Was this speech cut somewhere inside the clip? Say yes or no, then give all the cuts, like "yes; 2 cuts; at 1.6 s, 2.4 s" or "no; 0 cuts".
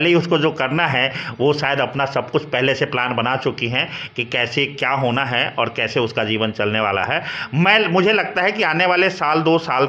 no; 0 cuts